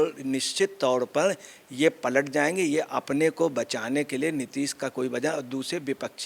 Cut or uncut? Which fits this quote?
uncut